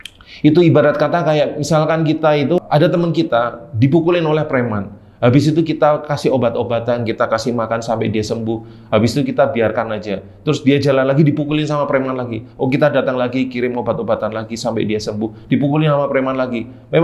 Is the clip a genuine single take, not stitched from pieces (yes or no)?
no